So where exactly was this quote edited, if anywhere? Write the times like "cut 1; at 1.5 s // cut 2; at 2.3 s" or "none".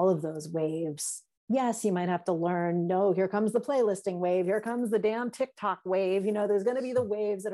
none